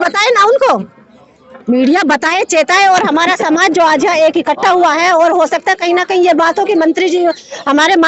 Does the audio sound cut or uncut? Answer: uncut